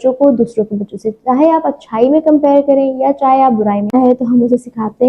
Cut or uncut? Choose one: cut